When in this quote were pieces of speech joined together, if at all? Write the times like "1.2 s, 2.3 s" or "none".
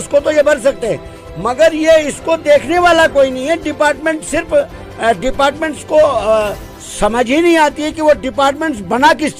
none